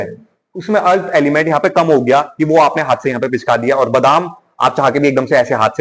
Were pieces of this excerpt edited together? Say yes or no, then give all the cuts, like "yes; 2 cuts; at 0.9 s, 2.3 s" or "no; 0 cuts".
no; 0 cuts